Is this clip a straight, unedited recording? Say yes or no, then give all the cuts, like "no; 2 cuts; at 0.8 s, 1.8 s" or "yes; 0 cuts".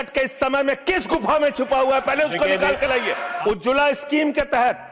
no; 1 cut; at 3.3 s